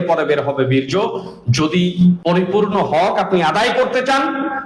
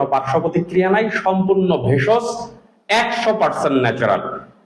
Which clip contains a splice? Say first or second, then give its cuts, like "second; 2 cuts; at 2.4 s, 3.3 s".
first; 1 cut; at 2.2 s